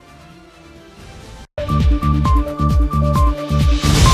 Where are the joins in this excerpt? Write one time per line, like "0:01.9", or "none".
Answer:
0:01.5